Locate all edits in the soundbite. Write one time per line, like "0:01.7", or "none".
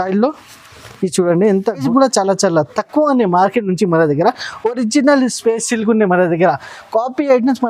0:01.8